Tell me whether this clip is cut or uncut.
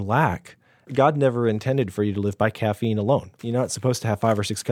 cut